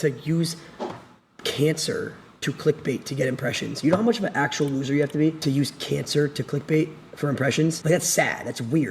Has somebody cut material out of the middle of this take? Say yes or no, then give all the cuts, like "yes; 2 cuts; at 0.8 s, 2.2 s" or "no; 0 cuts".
yes; 2 cuts; at 5.5 s, 7.8 s